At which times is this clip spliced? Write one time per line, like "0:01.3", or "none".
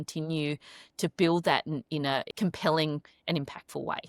0:02.3